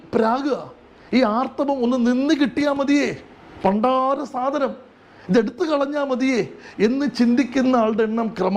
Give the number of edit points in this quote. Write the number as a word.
zero